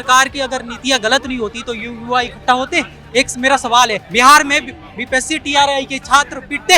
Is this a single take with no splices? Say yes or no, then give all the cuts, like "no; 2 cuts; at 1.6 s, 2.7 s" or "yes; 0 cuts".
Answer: no; 1 cut; at 4.0 s